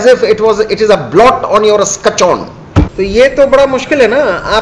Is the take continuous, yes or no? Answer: no